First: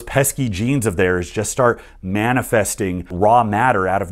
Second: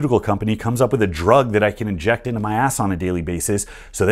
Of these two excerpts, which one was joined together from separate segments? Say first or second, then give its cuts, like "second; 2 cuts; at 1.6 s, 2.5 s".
first; 1 cut; at 3.1 s